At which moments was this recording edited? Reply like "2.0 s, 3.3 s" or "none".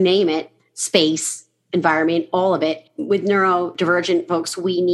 2.9 s, 3.7 s